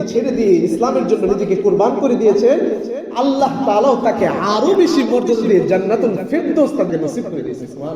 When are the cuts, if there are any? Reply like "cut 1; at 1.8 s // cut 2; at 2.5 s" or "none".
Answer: cut 1; at 6.9 s